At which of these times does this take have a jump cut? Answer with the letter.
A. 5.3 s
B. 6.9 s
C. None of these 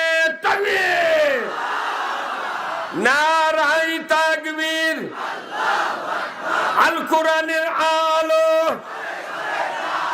A